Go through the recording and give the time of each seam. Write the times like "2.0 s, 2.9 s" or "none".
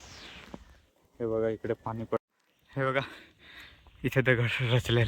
2.2 s